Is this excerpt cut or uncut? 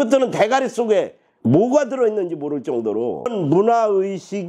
cut